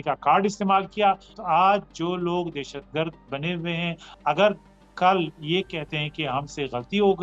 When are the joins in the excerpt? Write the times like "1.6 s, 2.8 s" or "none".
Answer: 1.3 s